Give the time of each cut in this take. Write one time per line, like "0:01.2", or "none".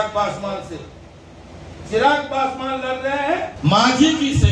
0:03.5

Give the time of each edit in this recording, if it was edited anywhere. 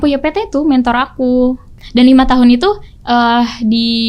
0:01.8

